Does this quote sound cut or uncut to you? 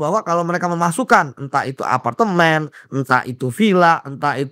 uncut